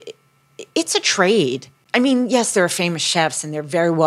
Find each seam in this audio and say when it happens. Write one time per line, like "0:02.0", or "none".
0:01.7